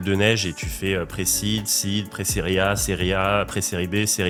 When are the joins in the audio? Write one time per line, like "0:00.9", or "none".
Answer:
none